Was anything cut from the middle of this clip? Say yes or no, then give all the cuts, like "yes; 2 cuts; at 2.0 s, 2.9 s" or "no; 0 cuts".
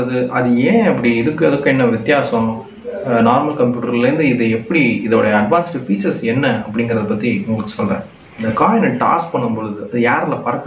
yes; 1 cut; at 8.3 s